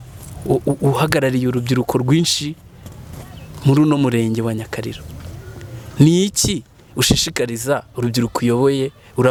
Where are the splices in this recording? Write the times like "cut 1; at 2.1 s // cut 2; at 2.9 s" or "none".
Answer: none